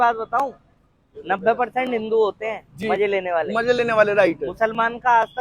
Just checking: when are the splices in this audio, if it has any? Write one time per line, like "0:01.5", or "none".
none